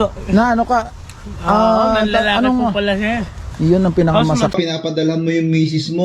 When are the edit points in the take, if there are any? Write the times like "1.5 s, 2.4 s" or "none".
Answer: 4.5 s